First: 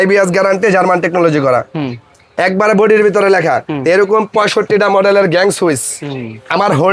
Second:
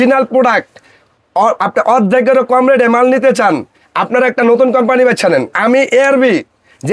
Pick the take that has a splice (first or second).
second